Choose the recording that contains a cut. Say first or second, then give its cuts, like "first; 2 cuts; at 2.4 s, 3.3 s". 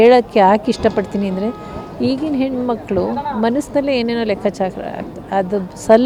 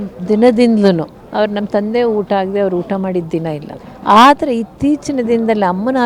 second; 2 cuts; at 1.2 s, 3.8 s